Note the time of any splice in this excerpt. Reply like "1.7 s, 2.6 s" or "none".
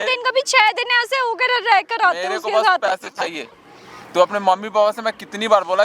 none